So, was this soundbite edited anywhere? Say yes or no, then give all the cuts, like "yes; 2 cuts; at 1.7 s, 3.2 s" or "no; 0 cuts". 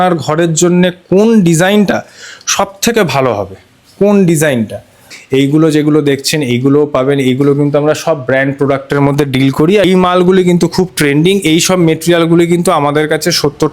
yes; 2 cuts; at 5.1 s, 9.8 s